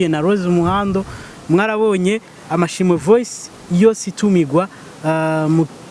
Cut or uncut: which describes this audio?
uncut